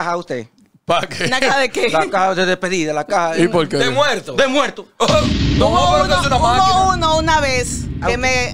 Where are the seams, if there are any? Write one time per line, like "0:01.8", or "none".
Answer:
none